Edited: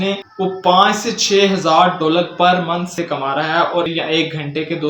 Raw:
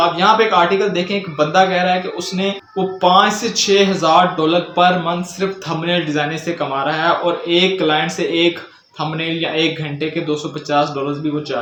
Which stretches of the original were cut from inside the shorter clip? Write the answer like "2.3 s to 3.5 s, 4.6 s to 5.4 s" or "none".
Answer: 5.3 s to 6.4 s, 7.4 s to 9.4 s